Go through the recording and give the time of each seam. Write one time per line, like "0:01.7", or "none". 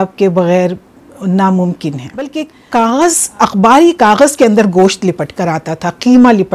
0:02.3